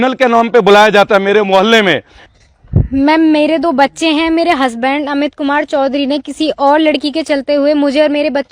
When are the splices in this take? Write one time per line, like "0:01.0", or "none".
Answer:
0:02.2

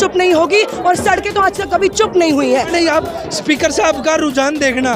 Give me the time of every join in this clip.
0:02.7

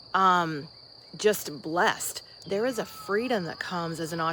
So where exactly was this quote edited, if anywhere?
0:02.4

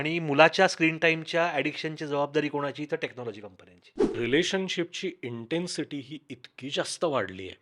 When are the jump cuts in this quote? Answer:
0:04.2

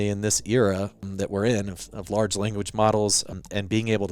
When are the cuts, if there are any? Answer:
0:01.1
0:03.3

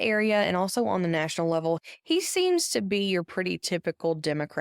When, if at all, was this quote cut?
0:01.8

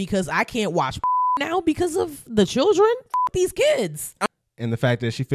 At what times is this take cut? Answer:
0:04.1

